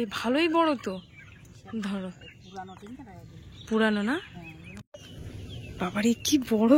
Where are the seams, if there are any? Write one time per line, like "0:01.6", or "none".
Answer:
0:04.8